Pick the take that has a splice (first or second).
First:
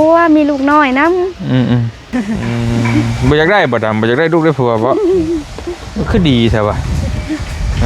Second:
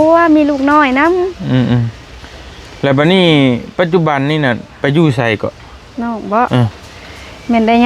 first